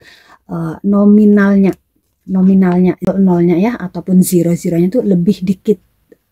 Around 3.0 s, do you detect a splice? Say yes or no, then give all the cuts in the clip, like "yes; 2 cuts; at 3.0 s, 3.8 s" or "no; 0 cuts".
yes; 1 cut; at 3.0 s